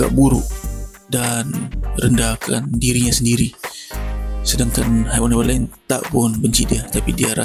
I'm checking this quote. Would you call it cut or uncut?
uncut